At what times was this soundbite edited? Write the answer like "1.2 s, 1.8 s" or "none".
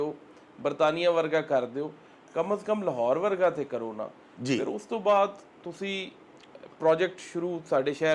none